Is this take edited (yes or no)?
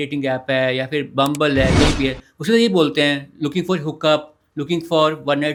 no